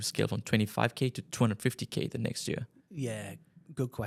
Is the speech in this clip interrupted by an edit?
no; 0 cuts

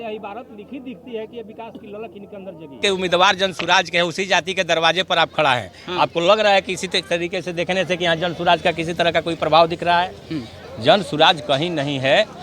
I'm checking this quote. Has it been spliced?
yes; 1 cut; at 2.8 s

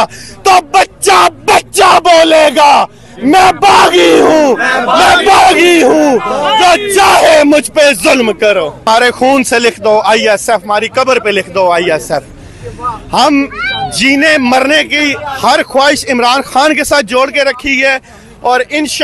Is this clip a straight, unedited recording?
no; 1 cut; at 8.8 s

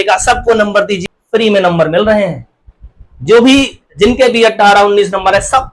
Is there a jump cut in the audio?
yes; 1 cut; at 1.0 s

